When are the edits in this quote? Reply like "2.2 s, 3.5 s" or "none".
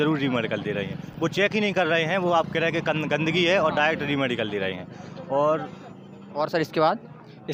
none